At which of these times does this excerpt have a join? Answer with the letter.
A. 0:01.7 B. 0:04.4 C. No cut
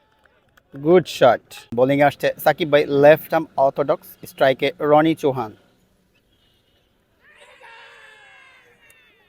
A